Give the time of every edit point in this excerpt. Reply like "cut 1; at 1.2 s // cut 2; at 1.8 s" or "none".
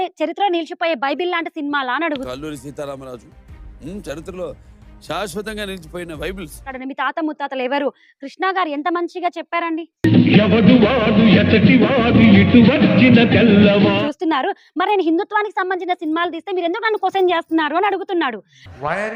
cut 1; at 2.3 s // cut 2; at 6.7 s // cut 3; at 14.0 s